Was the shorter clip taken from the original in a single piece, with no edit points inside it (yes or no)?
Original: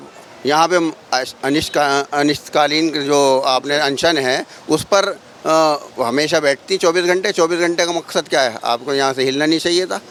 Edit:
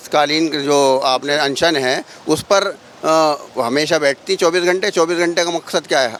yes